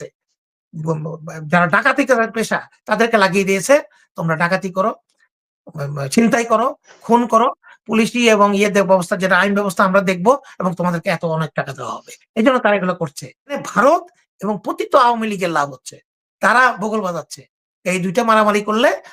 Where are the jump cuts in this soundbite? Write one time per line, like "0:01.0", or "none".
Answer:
0:13.6